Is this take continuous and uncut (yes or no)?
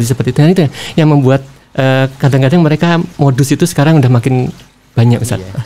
yes